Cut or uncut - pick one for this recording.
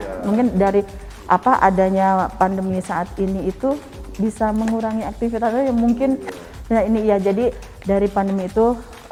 uncut